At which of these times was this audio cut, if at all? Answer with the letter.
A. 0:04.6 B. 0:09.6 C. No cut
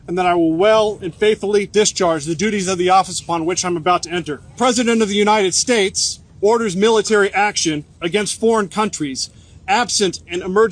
A